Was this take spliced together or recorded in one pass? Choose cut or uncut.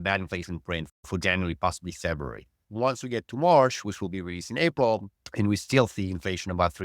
cut